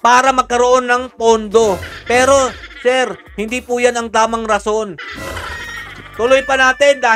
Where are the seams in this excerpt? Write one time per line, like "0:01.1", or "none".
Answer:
none